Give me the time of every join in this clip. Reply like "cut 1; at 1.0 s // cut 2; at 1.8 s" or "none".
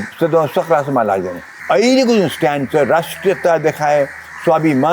cut 1; at 1.5 s